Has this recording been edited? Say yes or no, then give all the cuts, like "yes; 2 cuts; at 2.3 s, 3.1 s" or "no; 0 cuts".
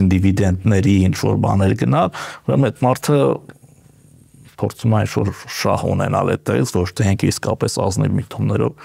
no; 0 cuts